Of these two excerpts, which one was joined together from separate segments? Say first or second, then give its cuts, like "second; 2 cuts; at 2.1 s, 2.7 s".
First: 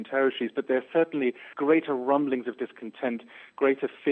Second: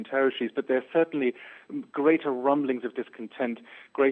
first; 1 cut; at 1.5 s